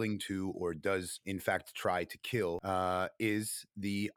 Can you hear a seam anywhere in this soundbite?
yes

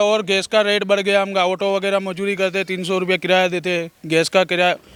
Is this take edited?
no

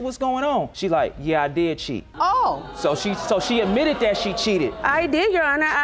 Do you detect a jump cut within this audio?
no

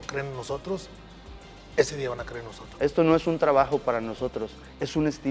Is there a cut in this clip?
yes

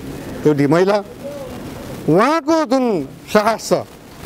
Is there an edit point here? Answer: no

